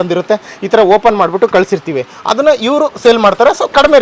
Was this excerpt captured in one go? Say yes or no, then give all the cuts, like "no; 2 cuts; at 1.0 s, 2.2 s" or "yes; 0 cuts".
yes; 0 cuts